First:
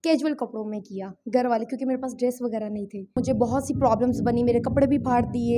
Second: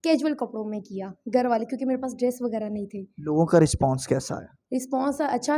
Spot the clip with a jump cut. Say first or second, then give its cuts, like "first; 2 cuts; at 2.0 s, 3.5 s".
first; 1 cut; at 3.2 s